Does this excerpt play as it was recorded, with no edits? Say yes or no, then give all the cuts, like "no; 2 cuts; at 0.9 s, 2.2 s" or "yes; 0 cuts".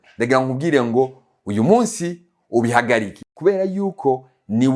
no; 1 cut; at 3.2 s